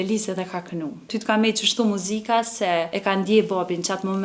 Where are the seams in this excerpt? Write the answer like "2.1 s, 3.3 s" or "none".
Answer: 1.1 s, 2.9 s